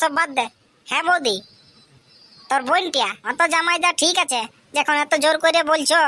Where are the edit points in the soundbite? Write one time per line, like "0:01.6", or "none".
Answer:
0:03.2